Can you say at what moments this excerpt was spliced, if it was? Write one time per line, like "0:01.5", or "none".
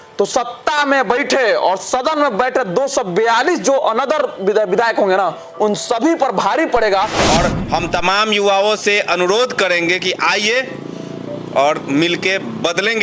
0:07.2

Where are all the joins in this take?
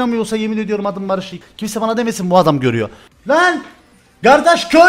0:01.4
0:03.0

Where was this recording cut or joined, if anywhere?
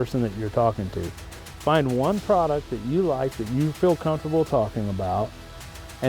none

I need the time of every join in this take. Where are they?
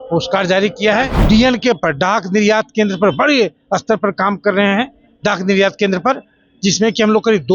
0:01.2

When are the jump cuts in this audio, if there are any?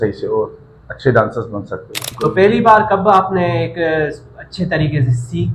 0:02.0

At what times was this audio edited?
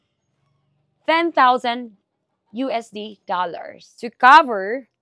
0:04.1

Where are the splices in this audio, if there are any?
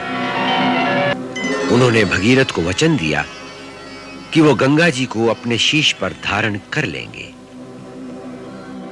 0:01.1

